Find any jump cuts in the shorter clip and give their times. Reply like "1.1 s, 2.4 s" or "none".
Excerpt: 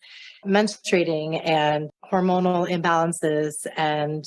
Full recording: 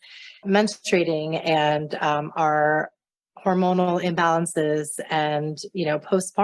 1.9 s